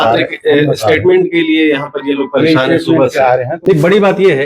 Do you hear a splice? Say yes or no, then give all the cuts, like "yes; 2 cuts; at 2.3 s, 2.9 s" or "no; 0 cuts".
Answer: yes; 1 cut; at 3.5 s